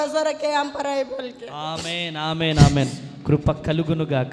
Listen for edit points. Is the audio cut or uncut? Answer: uncut